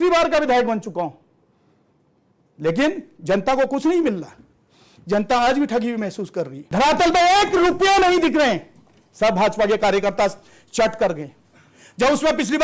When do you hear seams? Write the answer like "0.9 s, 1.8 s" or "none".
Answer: 6.6 s

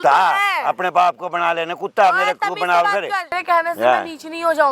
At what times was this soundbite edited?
3.3 s

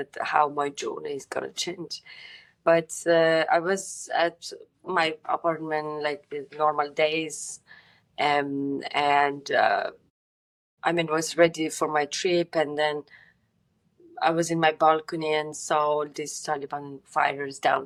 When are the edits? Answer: none

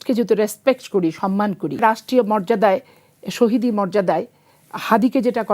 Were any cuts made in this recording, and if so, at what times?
1.8 s

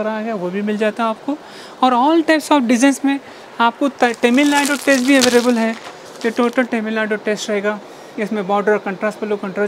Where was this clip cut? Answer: none

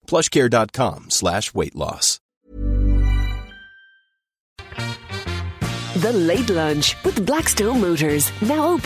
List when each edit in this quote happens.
4.5 s

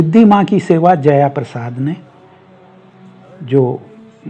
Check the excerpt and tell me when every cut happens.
none

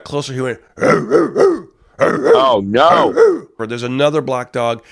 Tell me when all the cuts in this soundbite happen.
3.6 s

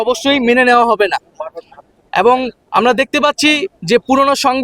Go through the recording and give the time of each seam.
none

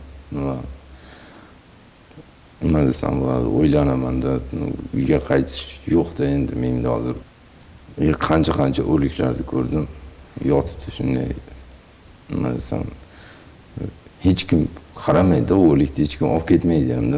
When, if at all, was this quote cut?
7.2 s

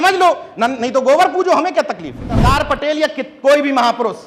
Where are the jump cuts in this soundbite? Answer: 2.4 s

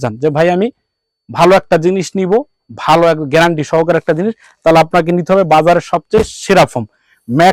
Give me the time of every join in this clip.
none

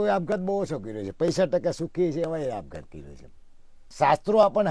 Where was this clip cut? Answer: 3.8 s

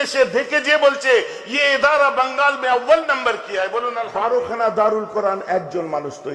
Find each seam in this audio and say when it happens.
3.9 s

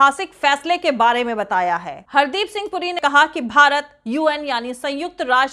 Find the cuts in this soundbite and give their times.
2.0 s, 3.0 s

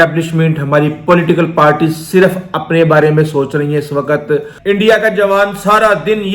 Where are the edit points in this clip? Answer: 4.5 s

